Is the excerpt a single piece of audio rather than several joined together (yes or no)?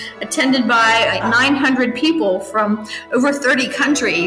no